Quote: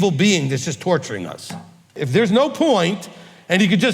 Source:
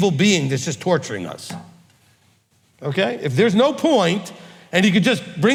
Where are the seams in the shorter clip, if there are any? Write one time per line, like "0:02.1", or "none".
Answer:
0:01.9